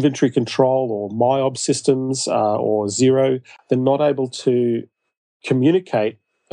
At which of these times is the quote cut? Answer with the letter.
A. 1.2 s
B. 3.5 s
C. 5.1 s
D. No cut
B